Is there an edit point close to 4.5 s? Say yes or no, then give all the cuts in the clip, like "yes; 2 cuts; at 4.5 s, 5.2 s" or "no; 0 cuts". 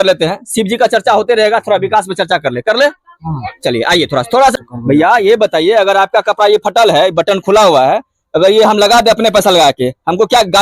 yes; 1 cut; at 4.5 s